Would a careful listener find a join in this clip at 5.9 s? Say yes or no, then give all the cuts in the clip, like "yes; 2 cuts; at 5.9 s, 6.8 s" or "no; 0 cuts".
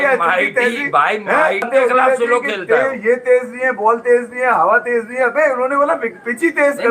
no; 1 cut; at 1.7 s